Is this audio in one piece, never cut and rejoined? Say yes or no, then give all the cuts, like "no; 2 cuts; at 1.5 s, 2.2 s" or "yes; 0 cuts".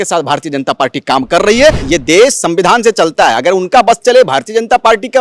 no; 1 cut; at 1.8 s